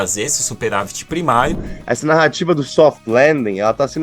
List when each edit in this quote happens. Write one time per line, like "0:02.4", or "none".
0:01.7